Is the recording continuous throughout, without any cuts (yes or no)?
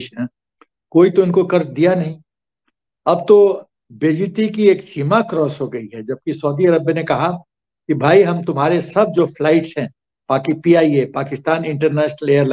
yes